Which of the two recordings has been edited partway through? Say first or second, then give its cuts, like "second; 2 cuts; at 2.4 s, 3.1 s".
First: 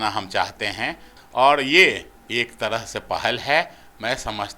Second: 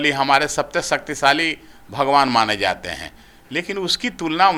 first; 2 cuts; at 1.2 s, 2.1 s